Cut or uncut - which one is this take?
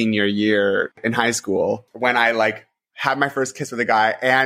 cut